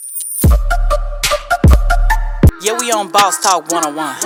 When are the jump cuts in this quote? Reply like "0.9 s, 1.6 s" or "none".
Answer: none